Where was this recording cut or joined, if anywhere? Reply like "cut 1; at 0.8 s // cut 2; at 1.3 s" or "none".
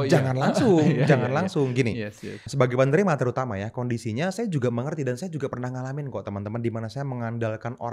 cut 1; at 2.4 s